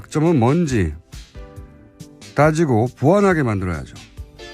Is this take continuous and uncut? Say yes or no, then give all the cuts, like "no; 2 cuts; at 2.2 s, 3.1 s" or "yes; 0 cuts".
no; 1 cut; at 2.3 s